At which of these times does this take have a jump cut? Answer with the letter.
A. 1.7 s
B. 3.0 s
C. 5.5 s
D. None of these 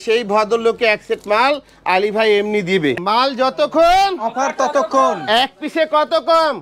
B